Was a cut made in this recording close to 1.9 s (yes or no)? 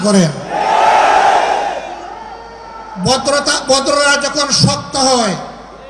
no